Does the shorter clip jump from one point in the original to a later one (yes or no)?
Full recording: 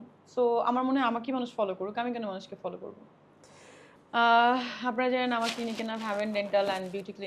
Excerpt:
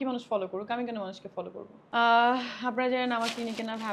yes